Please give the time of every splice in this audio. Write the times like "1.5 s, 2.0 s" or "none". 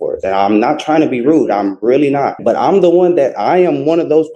2.4 s